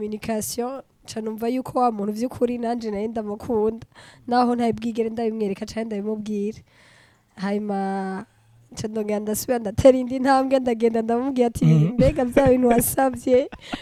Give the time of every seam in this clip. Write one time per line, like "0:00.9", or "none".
none